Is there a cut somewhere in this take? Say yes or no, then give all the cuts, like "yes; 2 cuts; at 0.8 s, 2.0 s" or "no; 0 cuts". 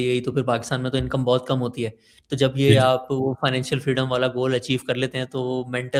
no; 0 cuts